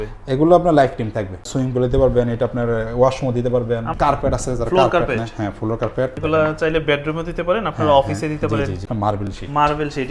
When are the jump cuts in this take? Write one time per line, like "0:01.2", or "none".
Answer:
0:01.5
0:03.9
0:06.1
0:08.8

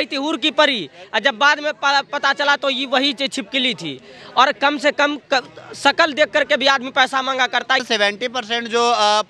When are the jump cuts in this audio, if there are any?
0:07.8

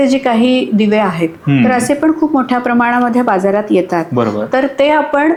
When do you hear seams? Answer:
none

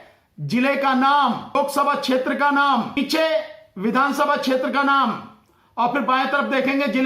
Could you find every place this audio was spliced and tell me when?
0:01.6
0:03.0

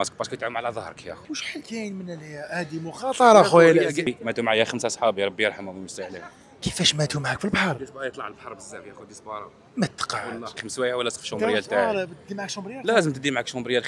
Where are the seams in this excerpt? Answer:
0:01.3
0:04.1
0:10.6

